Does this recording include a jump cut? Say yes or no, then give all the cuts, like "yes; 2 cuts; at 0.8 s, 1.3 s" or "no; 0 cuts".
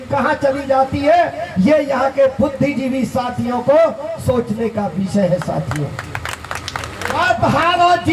yes; 1 cut; at 7.2 s